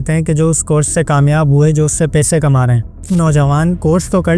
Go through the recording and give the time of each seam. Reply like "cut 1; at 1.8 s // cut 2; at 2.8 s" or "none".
cut 1; at 3.0 s